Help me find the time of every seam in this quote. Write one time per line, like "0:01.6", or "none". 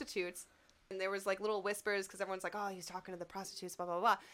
0:00.9